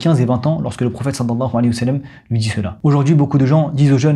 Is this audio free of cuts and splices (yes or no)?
no